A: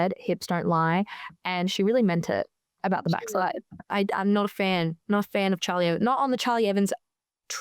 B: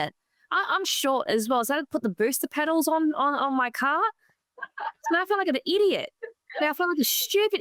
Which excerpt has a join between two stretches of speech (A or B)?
A